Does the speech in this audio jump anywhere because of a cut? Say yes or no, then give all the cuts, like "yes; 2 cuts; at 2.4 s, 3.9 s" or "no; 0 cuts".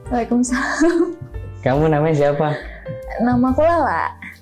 no; 0 cuts